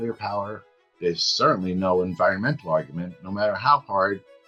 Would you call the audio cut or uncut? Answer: uncut